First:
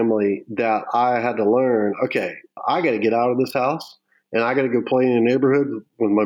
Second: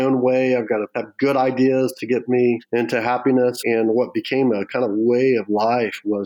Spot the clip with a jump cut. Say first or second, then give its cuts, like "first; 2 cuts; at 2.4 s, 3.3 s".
second; 3 cuts; at 1.0 s, 2.6 s, 3.6 s